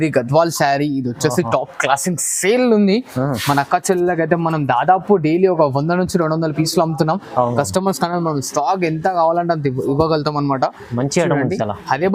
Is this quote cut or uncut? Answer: uncut